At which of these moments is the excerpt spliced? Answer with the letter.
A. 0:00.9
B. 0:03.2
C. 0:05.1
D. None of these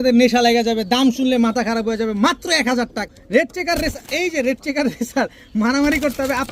B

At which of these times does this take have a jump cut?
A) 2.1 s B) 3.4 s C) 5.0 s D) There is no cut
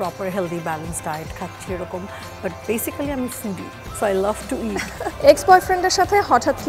C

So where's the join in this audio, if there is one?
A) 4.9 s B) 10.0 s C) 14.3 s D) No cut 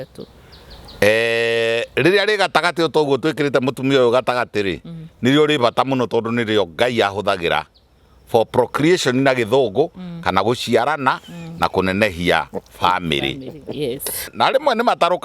C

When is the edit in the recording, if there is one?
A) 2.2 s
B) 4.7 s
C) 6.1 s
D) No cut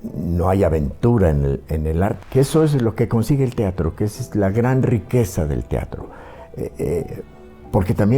A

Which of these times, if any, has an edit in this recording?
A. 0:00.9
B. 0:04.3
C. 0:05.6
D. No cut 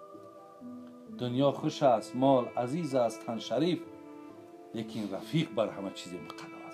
A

